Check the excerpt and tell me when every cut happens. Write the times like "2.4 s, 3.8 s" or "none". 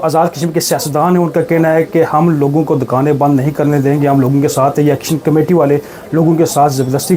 none